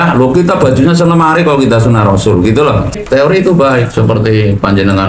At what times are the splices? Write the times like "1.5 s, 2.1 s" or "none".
2.9 s